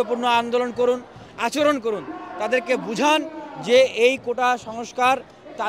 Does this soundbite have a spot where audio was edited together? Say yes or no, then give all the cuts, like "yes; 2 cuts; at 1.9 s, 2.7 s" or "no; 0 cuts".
no; 0 cuts